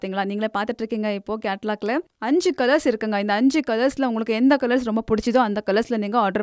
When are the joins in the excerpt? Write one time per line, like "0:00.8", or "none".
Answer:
0:02.1